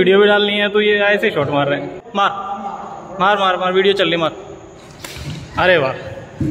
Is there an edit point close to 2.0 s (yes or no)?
yes